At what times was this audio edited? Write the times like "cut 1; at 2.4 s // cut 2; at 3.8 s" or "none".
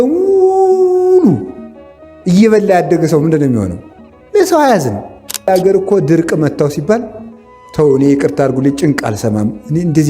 cut 1; at 5.4 s